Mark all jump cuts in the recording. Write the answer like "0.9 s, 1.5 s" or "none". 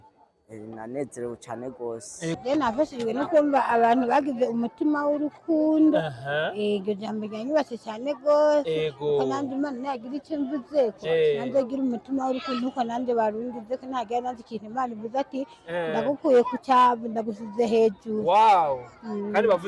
2.4 s